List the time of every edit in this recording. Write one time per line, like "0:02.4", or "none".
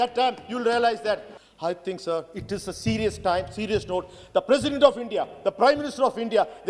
0:01.3